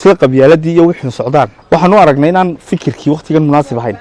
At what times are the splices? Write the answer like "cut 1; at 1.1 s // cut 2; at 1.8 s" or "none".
cut 1; at 1.6 s